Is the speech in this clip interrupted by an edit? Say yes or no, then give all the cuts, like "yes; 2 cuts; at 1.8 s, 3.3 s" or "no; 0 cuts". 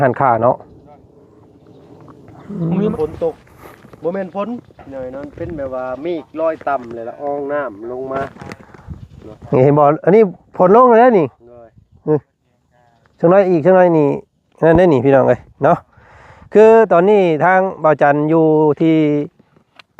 yes; 1 cut; at 2.9 s